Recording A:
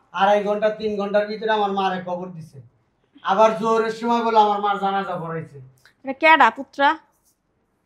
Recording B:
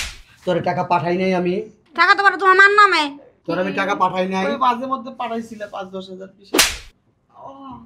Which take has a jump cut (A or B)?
B